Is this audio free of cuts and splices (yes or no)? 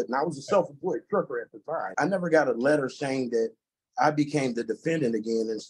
no